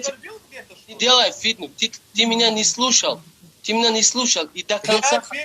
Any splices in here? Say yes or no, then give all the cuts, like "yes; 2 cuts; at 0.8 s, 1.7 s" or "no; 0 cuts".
yes; 1 cut; at 0.9 s